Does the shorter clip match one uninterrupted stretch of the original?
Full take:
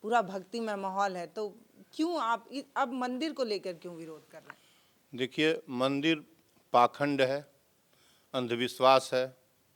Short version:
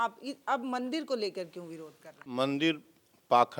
no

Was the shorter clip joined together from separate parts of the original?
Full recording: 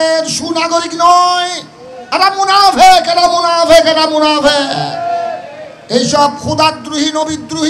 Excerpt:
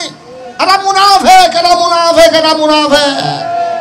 no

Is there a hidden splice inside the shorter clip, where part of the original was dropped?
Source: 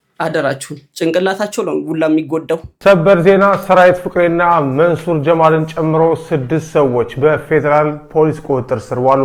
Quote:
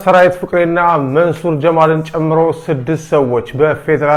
no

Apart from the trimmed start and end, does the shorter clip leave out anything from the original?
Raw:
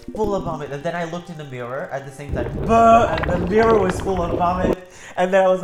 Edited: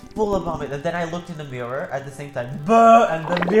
no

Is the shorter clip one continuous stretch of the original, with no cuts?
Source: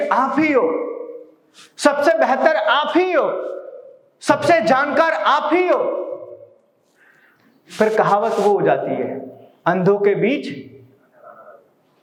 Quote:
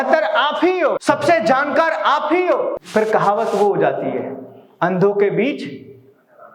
no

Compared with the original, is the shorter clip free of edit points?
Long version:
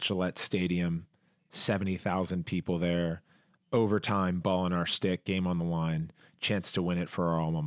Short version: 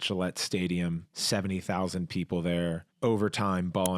no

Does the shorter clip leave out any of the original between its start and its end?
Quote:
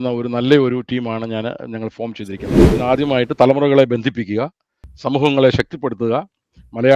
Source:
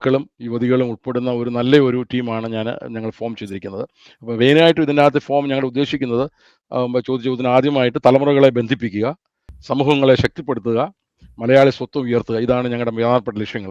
yes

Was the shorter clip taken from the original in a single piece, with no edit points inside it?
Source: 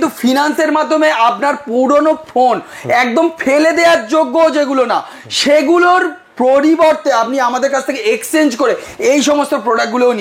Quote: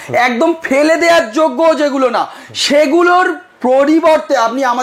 yes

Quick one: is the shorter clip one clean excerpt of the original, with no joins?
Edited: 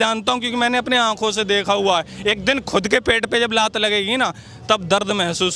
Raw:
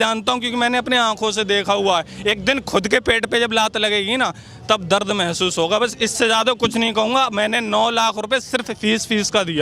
yes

